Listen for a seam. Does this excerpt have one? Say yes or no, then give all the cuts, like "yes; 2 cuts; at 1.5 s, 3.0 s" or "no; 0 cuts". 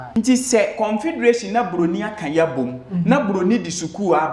no; 0 cuts